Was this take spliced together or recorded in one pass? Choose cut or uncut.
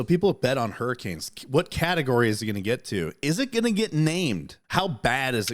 cut